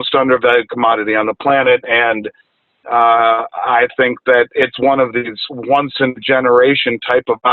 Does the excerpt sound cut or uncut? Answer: uncut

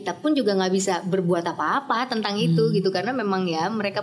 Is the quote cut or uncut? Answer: uncut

